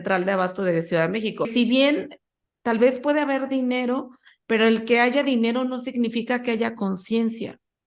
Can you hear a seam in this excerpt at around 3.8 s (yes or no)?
no